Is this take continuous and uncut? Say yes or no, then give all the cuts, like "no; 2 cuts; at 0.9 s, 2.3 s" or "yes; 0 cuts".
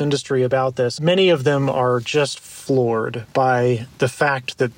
no; 1 cut; at 1.0 s